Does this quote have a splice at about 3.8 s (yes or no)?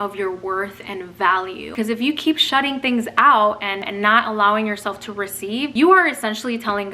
yes